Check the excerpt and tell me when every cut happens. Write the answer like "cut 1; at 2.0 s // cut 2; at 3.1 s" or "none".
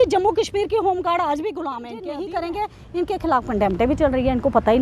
cut 1; at 1.8 s